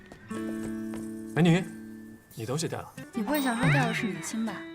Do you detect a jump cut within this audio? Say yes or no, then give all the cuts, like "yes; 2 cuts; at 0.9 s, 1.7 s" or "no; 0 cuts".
yes; 1 cut; at 3.0 s